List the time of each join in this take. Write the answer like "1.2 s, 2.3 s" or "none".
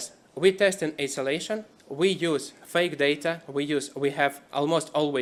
none